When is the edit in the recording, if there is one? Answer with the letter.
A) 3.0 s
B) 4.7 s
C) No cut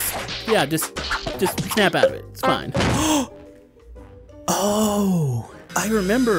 A